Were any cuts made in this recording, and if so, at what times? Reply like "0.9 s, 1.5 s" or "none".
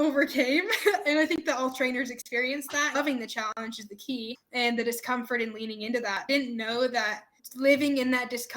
3.0 s, 6.2 s